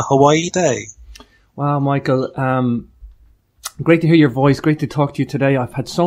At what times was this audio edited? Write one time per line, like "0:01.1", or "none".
0:03.8